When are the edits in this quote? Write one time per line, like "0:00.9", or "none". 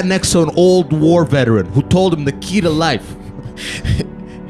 none